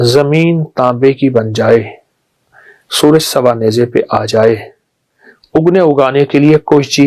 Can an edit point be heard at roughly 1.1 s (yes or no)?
yes